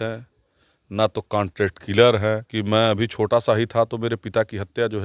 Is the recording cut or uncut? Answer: cut